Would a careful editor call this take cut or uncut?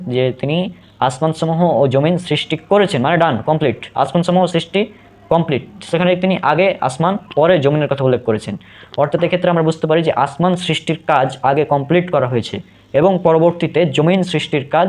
uncut